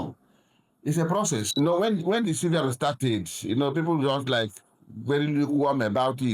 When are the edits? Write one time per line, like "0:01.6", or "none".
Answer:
0:01.5